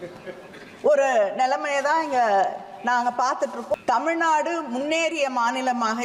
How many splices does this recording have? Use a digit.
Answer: 1